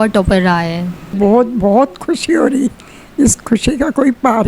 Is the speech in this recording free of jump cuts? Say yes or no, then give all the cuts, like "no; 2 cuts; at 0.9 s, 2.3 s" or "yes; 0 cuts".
no; 1 cut; at 1.1 s